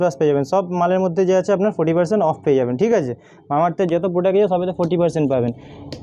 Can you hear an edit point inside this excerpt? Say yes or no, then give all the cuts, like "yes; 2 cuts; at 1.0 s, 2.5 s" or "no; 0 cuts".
no; 0 cuts